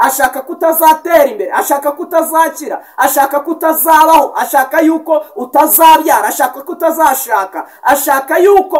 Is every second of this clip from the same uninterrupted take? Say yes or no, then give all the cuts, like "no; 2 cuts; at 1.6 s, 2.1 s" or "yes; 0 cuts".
yes; 0 cuts